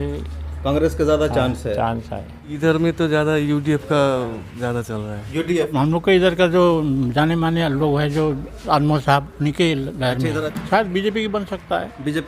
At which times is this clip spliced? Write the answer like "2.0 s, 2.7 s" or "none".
2.5 s, 5.7 s, 10.5 s